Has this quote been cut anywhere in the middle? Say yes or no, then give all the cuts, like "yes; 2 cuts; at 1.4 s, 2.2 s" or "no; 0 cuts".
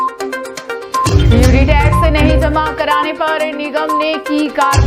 yes; 1 cut; at 1.0 s